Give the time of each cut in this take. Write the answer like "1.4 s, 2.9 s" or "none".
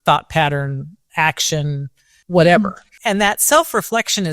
2.2 s, 2.9 s